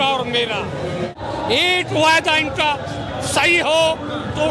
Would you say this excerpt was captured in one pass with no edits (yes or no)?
no